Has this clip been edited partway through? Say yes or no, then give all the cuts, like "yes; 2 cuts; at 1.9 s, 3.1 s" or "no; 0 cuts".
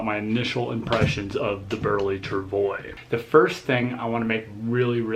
yes; 1 cut; at 2.9 s